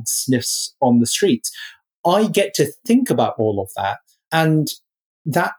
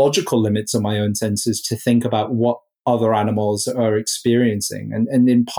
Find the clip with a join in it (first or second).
first